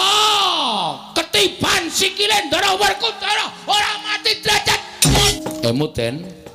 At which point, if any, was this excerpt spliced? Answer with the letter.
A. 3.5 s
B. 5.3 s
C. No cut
B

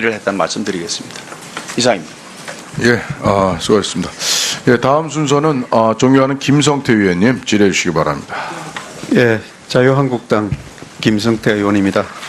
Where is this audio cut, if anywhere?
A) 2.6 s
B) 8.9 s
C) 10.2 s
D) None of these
B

